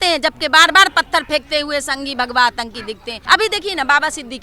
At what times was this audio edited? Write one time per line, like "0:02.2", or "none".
0:03.1